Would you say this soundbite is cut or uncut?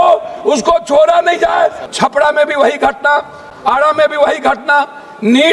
cut